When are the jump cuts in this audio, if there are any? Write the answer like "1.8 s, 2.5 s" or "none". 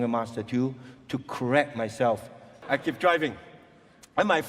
2.6 s